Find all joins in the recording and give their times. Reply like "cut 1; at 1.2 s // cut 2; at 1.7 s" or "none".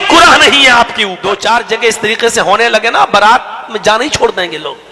cut 1; at 1.1 s